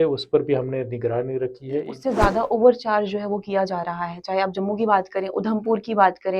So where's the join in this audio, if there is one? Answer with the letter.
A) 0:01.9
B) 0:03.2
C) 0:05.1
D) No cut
A